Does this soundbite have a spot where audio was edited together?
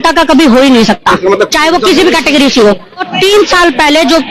yes; 1 cut; at 3.1 s

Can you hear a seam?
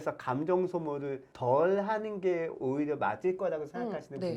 no; 0 cuts

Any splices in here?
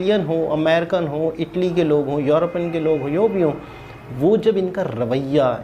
no; 0 cuts

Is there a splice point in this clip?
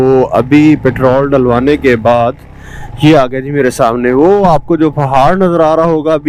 no; 0 cuts

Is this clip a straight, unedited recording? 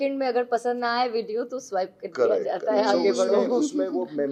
yes; 0 cuts

